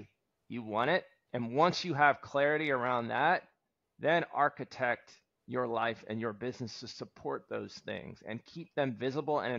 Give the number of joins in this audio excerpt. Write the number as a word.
one